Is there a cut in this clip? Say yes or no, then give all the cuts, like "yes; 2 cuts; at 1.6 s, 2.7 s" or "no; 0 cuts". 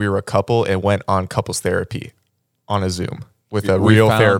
no; 0 cuts